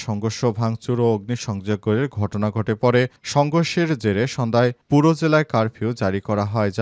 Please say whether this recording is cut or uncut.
uncut